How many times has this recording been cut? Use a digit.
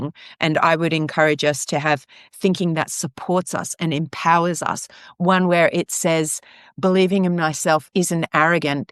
0